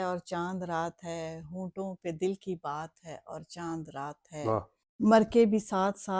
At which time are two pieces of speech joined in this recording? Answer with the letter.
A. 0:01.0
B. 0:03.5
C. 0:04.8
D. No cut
C